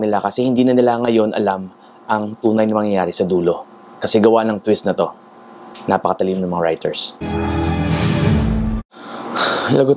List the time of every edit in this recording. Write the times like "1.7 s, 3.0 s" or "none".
7.2 s